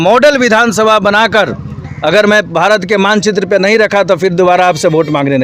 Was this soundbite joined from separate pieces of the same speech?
no; 0 cuts

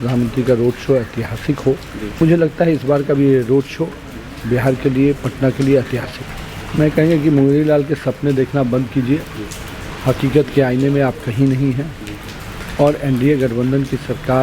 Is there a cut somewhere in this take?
yes; 2 cuts; at 2.2 s, 6.1 s

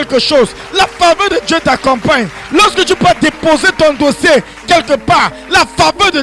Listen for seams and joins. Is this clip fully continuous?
yes; 0 cuts

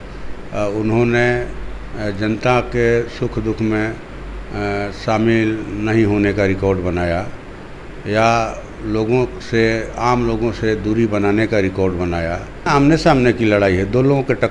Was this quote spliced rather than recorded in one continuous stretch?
yes; 1 cut; at 12.7 s

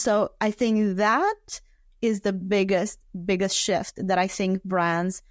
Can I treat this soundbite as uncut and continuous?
yes; 0 cuts

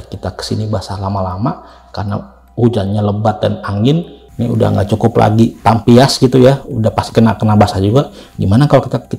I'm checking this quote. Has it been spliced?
no; 0 cuts

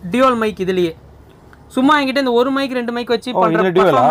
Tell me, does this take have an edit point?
no; 0 cuts

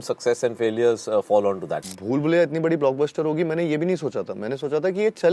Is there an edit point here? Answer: yes; 1 cut; at 1.8 s

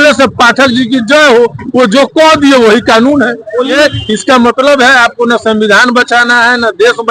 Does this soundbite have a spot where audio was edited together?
yes; 1 cut; at 3.7 s

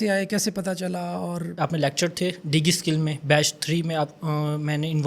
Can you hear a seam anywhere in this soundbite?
no; 0 cuts

